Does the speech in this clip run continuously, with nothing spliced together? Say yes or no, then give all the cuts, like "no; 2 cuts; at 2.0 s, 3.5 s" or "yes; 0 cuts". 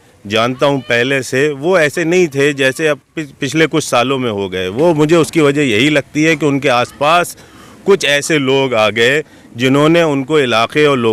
yes; 0 cuts